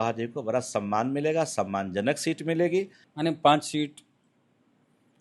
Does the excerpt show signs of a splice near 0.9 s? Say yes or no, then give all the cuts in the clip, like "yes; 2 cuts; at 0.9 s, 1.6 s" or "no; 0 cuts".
no; 1 cut; at 3.0 s